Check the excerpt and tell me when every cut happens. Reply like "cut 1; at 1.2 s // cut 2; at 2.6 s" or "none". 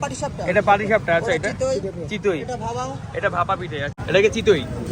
cut 1; at 3.9 s